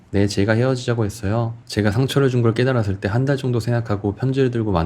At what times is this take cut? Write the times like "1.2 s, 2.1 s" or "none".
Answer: 1.5 s